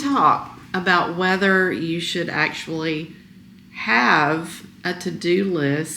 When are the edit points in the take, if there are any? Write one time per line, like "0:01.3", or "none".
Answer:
none